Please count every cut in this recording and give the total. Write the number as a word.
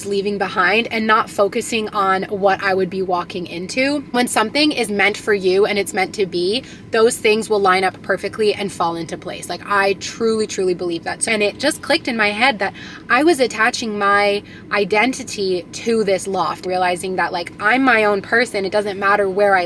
three